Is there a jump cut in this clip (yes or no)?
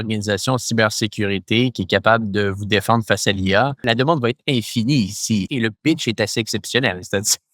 yes